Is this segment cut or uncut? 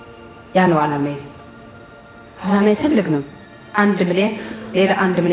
cut